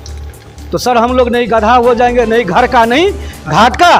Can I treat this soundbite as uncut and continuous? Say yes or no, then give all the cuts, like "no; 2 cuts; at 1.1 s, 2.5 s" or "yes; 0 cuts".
yes; 0 cuts